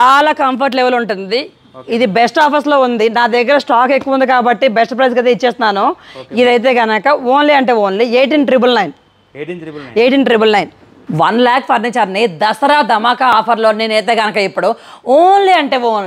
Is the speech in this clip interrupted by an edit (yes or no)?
no